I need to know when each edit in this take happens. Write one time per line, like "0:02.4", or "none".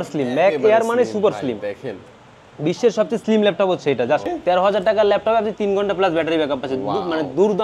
0:04.2